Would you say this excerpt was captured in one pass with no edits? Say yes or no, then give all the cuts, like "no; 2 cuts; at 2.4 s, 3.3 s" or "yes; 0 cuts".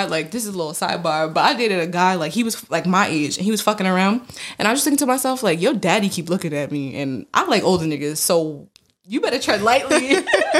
yes; 0 cuts